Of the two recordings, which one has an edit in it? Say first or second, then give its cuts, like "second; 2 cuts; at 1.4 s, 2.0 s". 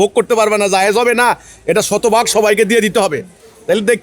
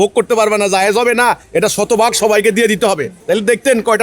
second; 2 cuts; at 1.4 s, 3.1 s